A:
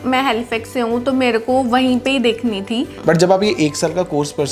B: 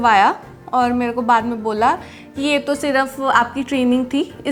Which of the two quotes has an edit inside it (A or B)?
A